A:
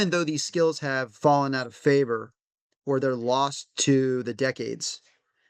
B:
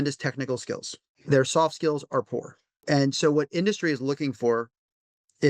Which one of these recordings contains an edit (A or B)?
B